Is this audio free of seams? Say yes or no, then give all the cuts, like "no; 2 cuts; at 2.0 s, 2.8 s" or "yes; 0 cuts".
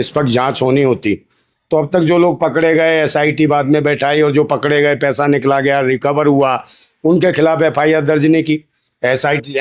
yes; 0 cuts